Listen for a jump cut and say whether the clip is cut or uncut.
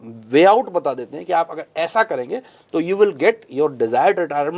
uncut